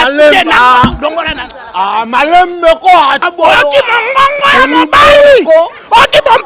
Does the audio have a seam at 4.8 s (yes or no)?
no